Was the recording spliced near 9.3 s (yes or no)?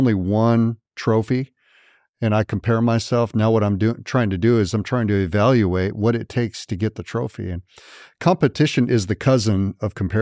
no